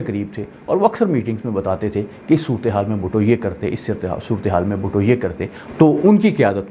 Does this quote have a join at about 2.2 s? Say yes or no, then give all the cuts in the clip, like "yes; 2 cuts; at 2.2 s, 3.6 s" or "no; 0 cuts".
no; 1 cut; at 5.6 s